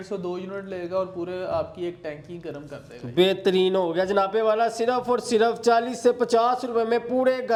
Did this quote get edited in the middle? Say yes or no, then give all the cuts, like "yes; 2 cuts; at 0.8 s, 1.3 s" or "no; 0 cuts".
no; 0 cuts